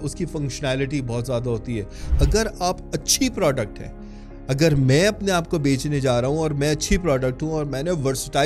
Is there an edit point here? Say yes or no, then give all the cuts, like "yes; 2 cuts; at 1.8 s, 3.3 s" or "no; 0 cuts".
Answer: yes; 1 cut; at 2.0 s